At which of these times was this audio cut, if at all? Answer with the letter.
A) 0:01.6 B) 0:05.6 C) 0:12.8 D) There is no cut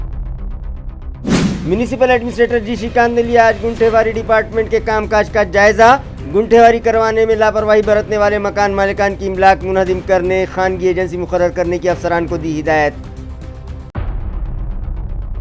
A